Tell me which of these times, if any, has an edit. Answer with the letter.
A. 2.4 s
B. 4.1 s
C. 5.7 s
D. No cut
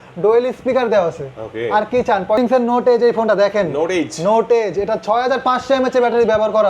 A